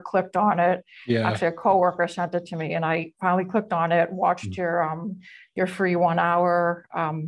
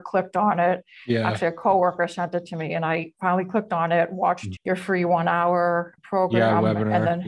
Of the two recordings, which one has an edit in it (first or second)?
second